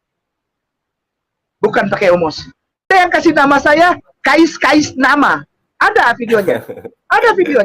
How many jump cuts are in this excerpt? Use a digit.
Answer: 1